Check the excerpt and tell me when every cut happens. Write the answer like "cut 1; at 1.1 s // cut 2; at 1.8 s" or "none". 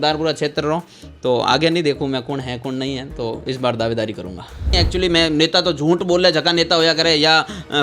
cut 1; at 4.7 s

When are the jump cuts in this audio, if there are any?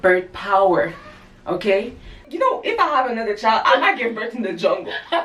cut 1; at 2.2 s

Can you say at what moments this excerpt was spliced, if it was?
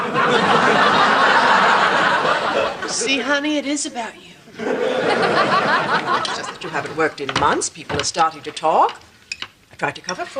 cut 1; at 6.5 s

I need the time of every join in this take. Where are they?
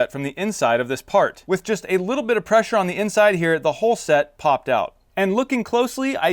cut 1; at 1.4 s

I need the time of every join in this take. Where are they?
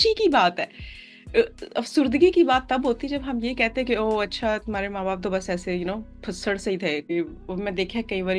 cut 1; at 7.1 s

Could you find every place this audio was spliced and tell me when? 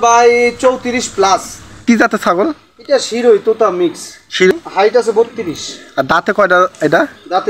cut 1; at 1.8 s // cut 2; at 4.5 s

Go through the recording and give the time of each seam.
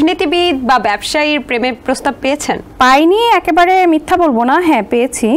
cut 1; at 2.7 s

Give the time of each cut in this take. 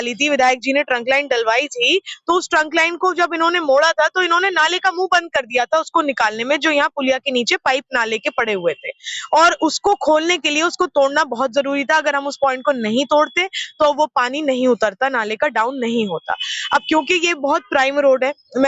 none

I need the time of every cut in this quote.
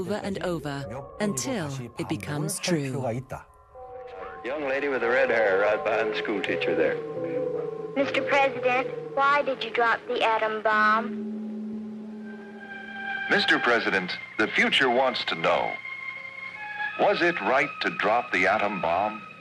cut 1; at 2.6 s

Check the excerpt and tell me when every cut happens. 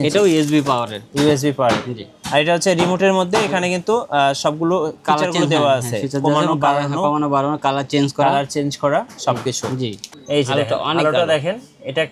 cut 1; at 10.0 s

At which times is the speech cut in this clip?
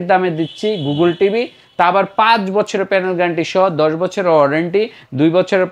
none

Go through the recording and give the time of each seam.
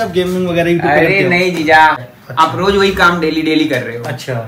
cut 1; at 2.0 s

